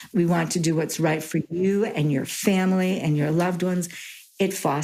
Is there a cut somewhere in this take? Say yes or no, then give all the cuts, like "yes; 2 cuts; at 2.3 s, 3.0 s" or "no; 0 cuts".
no; 0 cuts